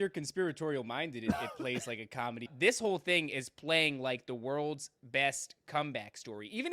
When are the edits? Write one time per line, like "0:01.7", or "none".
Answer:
0:02.5